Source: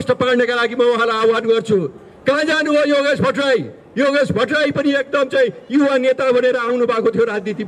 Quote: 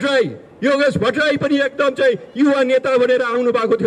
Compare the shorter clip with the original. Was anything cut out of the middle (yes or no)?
no